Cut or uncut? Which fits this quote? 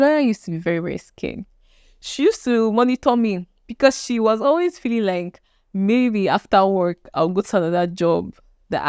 uncut